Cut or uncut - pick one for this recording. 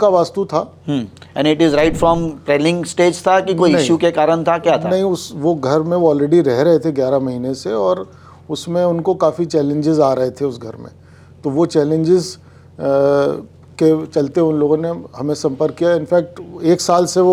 uncut